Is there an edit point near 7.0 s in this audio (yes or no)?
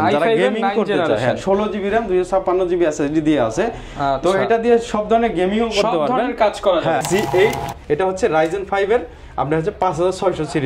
yes